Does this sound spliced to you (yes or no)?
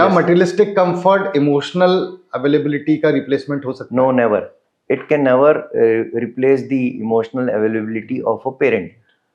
no